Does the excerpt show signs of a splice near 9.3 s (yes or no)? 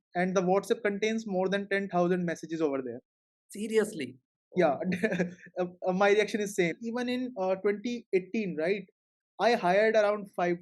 no